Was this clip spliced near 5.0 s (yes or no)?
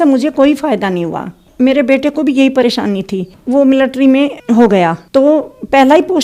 no